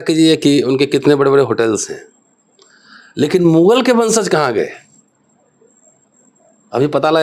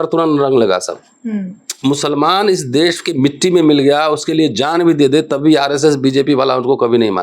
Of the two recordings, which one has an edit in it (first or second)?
second